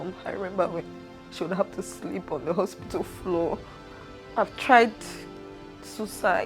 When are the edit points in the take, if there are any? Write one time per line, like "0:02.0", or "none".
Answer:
0:04.3